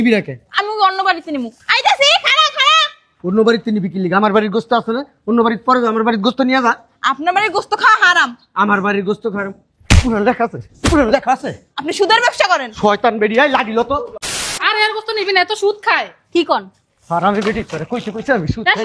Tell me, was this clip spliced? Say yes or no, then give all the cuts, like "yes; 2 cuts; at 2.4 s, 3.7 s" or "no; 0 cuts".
yes; 1 cut; at 14.6 s